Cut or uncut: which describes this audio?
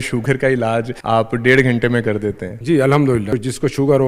cut